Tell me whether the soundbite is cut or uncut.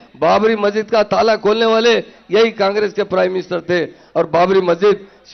uncut